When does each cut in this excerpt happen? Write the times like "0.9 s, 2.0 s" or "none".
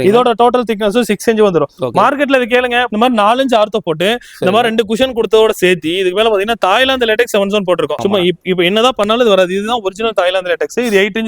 2.9 s, 8.0 s